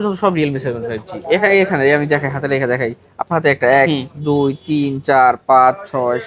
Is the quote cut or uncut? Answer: uncut